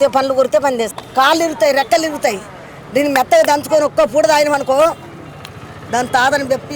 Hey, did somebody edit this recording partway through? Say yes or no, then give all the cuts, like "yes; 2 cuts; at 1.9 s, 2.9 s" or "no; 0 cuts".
yes; 1 cut; at 1.0 s